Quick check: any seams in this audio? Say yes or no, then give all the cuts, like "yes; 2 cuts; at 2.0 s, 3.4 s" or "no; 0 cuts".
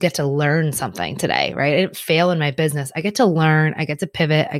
no; 0 cuts